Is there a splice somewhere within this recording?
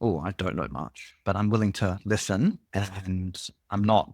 yes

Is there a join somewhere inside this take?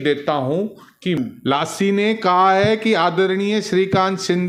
yes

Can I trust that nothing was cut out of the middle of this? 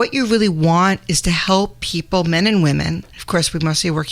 no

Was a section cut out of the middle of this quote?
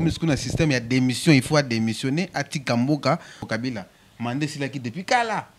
yes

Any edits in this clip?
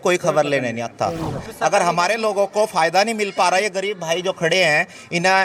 yes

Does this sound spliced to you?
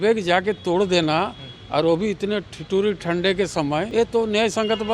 yes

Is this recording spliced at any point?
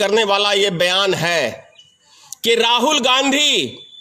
no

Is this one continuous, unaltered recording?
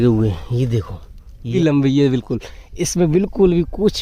no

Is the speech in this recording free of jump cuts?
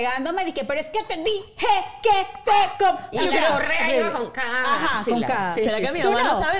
yes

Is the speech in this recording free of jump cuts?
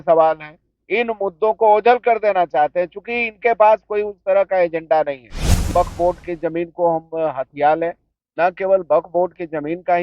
no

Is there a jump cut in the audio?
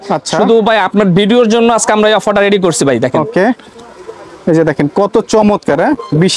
no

